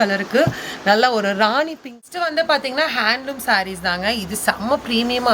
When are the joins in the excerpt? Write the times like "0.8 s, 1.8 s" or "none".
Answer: 2.0 s